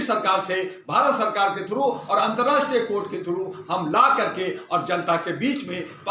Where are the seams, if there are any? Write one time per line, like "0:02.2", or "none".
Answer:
none